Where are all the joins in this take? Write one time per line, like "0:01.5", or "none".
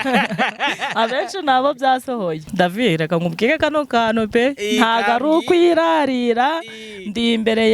0:02.5